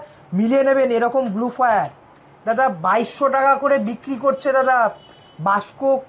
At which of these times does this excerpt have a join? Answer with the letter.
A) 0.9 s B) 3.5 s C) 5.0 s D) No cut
D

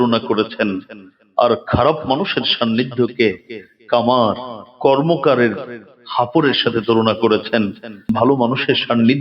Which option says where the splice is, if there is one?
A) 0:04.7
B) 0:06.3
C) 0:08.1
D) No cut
C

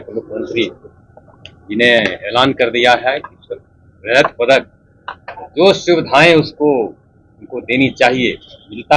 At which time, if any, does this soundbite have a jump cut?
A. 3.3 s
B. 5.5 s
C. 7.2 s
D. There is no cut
D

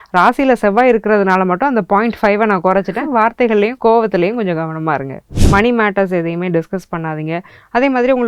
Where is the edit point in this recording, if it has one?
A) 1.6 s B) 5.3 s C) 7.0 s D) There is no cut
B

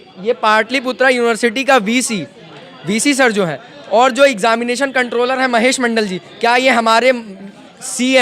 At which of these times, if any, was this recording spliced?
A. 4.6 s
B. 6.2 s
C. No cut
C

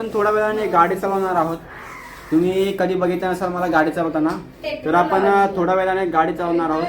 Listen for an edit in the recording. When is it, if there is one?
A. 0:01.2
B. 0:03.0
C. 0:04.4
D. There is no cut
D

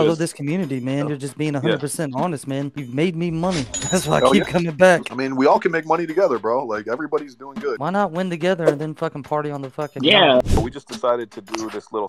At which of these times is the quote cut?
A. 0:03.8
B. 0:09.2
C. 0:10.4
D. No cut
C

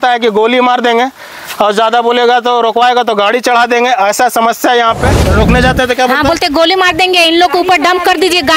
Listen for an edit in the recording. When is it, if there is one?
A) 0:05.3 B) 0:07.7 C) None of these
A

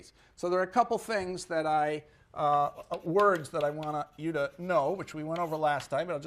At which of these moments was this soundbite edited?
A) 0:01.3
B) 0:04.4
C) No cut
B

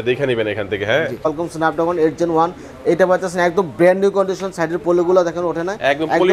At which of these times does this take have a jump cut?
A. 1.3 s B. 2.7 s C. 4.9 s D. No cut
A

